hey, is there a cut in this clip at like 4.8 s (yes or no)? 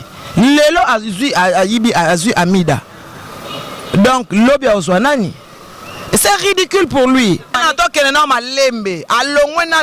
no